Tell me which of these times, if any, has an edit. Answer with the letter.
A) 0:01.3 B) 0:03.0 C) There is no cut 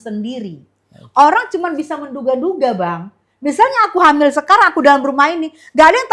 C